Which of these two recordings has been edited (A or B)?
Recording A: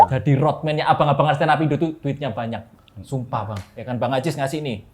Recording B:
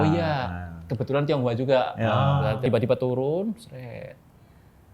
B